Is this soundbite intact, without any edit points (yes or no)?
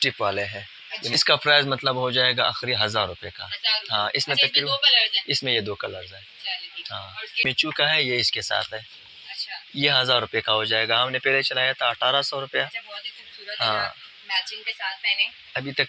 no